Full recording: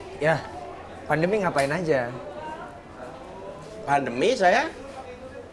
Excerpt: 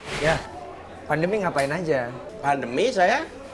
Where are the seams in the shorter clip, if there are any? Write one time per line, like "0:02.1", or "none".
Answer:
0:02.2